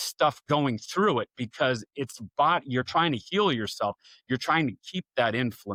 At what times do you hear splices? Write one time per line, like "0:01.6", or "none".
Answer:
none

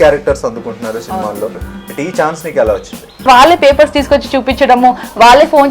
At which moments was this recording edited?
0:01.7
0:03.3

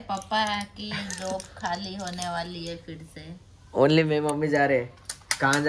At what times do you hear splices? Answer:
none

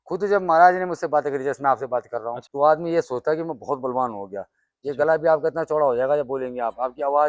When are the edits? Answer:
0:02.4

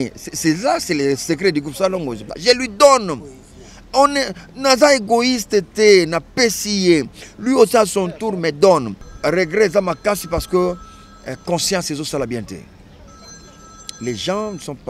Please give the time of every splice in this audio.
0:02.3
0:09.0

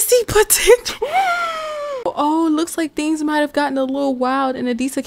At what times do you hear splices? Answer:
0:01.9

